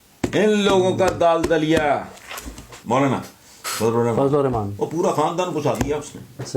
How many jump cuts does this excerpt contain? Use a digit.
1